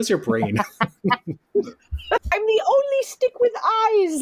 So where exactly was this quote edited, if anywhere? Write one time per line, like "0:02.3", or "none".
0:02.3